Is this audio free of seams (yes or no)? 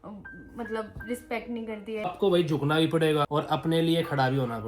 no